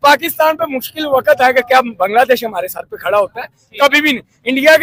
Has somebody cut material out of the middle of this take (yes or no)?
no